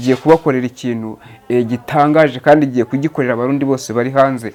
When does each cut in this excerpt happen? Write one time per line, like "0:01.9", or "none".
none